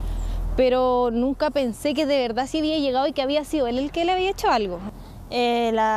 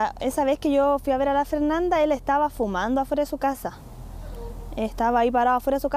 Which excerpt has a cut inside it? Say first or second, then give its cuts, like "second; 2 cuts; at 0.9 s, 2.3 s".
first; 1 cut; at 4.8 s